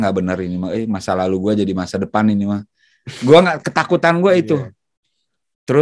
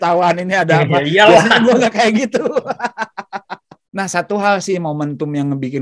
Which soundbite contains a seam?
second; 1 cut; at 3.8 s

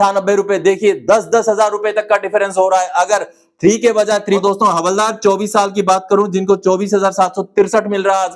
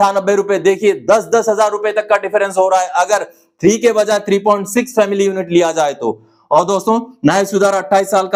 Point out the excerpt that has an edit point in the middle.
first; 1 cut; at 4.4 s

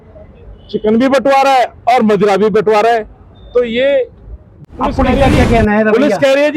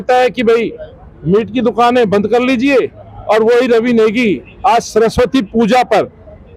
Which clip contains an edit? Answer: first; 1 cut; at 4.6 s

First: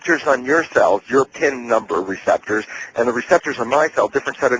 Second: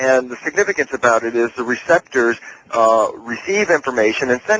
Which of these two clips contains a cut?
second; 1 cut; at 1.0 s

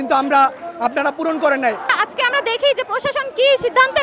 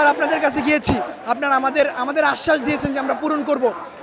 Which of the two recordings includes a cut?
first; 1 cut; at 1.9 s

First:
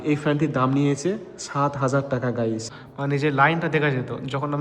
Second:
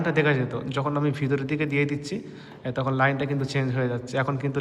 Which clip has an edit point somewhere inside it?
first; 1 cut; at 2.7 s

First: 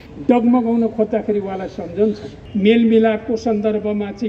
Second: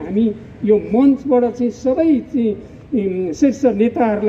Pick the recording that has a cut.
first; 1 cut; at 2.3 s

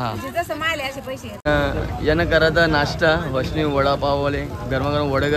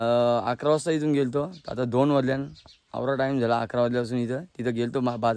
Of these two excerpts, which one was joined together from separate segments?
first; 1 cut; at 1.4 s

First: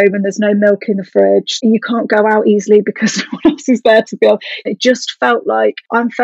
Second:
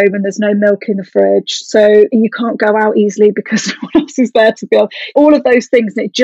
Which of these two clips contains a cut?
first; 2 cuts; at 1.6 s, 4.6 s

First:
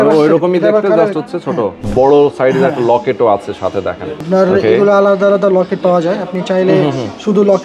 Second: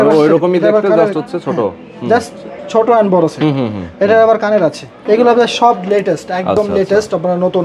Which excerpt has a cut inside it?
first; 1 cut; at 1.8 s

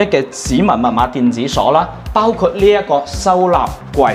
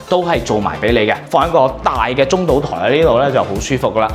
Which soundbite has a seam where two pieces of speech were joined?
second; 1 cut; at 1.2 s

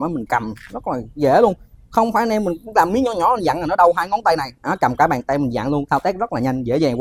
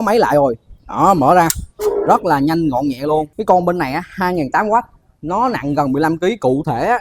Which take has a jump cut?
second; 1 cut; at 3.3 s

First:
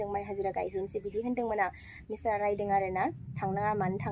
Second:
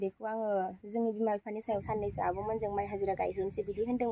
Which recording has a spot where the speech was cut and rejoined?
second; 1 cut; at 1.7 s

